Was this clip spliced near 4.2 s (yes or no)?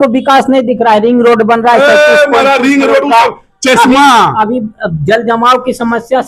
no